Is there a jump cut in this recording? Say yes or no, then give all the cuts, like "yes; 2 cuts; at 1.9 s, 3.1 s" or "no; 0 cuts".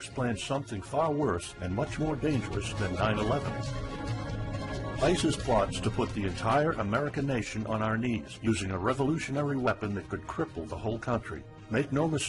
yes; 1 cut; at 1.5 s